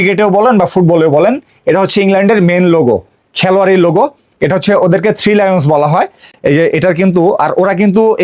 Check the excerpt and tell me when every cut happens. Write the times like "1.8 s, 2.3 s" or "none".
none

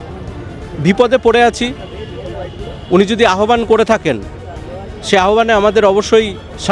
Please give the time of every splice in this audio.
none

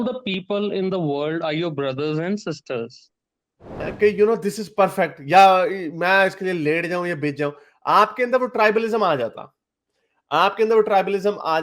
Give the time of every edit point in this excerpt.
3.9 s

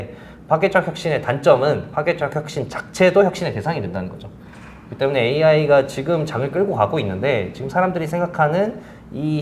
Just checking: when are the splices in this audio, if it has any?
none

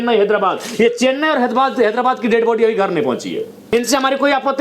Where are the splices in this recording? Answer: 3.6 s

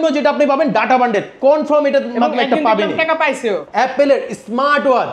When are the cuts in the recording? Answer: 3.6 s

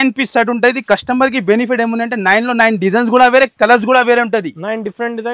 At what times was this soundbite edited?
none

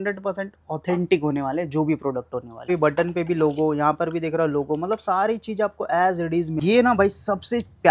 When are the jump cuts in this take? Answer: 2.7 s, 6.5 s

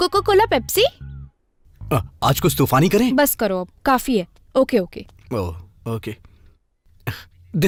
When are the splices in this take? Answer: none

